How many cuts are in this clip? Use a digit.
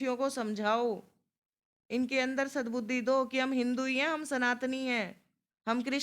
0